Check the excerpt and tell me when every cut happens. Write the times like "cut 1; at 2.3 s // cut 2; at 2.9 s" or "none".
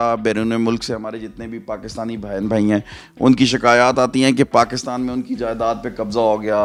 none